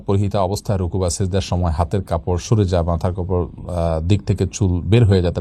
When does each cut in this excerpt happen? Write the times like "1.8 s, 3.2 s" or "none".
none